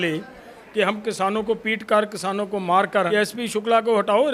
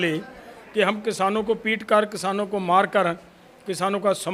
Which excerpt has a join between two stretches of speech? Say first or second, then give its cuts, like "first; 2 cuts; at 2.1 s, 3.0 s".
first; 1 cut; at 3.1 s